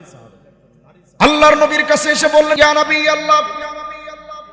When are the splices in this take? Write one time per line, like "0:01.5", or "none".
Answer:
0:02.6